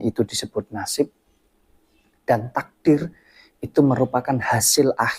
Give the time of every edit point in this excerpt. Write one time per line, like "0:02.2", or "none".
none